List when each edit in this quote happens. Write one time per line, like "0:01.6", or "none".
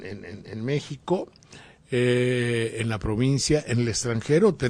0:03.2